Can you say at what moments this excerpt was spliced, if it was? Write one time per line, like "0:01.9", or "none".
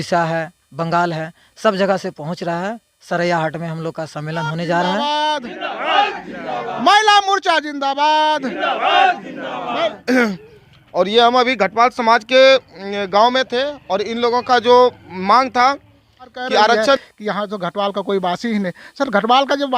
0:05.0
0:17.0